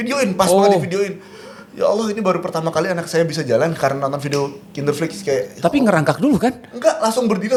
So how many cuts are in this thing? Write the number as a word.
zero